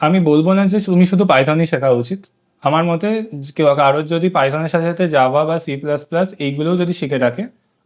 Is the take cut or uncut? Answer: uncut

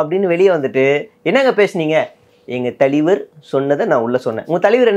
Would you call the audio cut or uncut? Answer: uncut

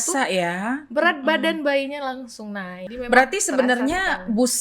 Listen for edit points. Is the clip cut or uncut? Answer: cut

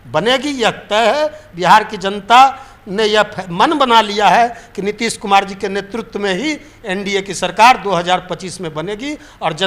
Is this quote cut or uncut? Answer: uncut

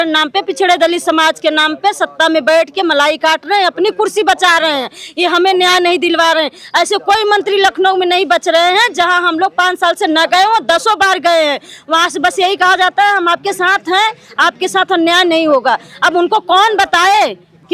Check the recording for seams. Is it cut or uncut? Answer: uncut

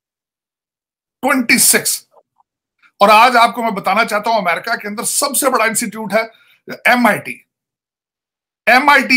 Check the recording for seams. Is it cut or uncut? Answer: uncut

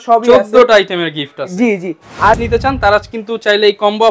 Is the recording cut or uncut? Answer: cut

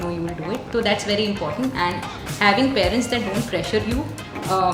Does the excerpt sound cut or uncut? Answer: uncut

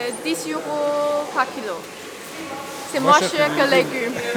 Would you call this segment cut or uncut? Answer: uncut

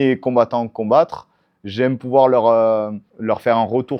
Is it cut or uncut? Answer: cut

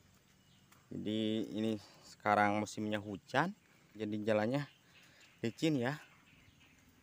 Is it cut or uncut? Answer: cut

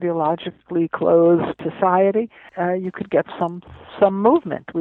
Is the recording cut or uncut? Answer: cut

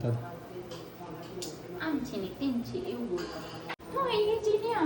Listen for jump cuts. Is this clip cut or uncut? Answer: cut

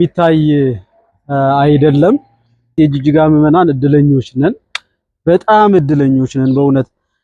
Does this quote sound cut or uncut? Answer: cut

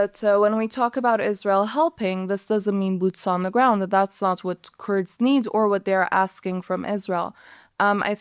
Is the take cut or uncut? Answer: uncut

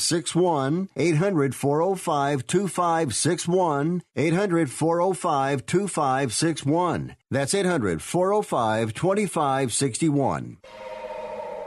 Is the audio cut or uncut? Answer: cut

